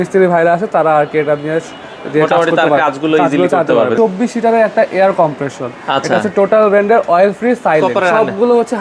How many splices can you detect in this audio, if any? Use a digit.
2